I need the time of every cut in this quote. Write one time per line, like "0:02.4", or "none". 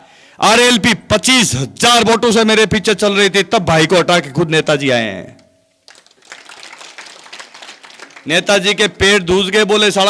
none